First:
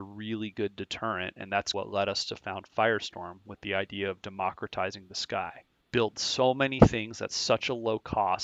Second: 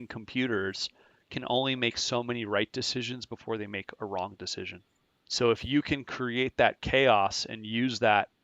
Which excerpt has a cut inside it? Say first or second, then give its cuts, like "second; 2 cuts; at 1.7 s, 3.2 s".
second; 1 cut; at 6.8 s